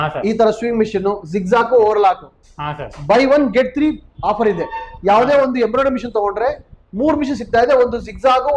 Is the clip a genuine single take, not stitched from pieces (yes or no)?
yes